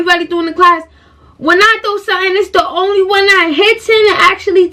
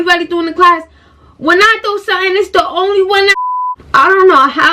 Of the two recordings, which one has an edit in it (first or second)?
second